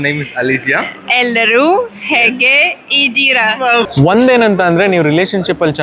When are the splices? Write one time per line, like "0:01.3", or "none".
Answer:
0:03.9